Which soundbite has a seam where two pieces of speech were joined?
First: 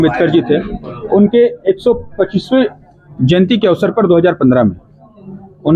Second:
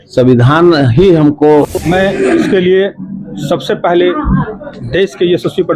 second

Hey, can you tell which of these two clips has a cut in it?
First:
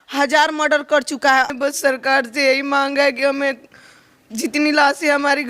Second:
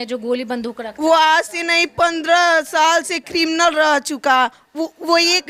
first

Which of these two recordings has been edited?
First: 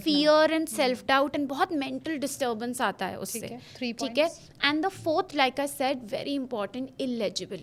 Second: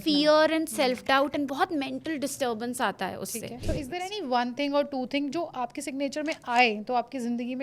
second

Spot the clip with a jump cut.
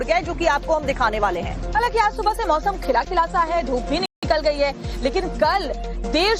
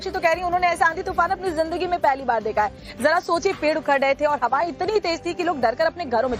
second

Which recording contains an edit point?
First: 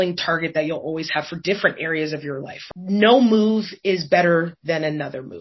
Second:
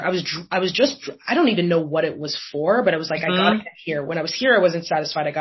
first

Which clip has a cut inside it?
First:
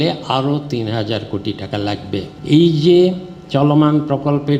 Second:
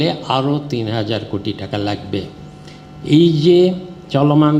first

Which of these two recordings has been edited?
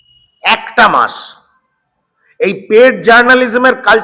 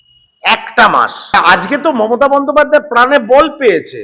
second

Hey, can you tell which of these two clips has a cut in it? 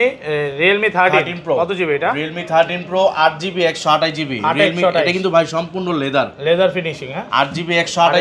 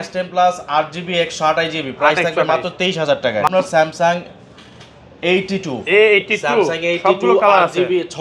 second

